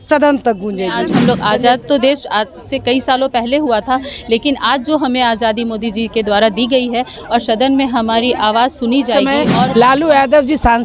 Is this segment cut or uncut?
cut